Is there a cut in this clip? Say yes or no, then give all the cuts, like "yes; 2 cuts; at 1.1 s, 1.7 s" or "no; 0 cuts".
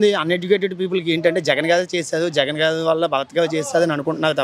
no; 0 cuts